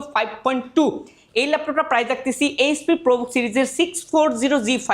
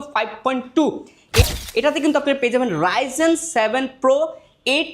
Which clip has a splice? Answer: second; 1 cut; at 1.5 s

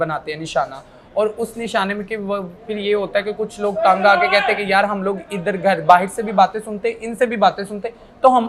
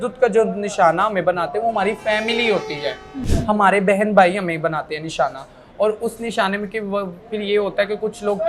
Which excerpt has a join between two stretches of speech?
second; 1 cut; at 3.3 s

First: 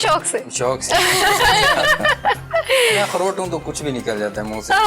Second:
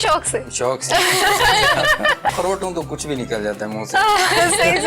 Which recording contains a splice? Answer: second; 1 cut; at 2.3 s

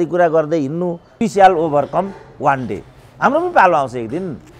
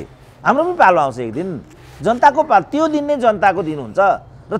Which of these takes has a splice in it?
first; 1 cut; at 1.2 s

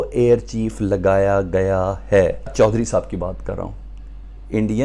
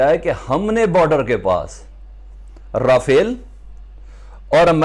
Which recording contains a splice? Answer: first; 1 cut; at 2.5 s

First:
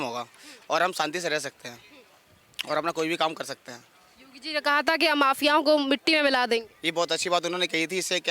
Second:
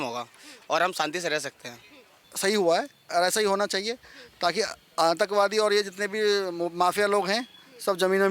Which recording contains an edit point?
second; 1 cut; at 2.3 s

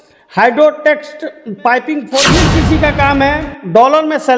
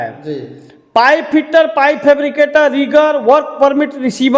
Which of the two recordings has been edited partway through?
first; 1 cut; at 2.3 s

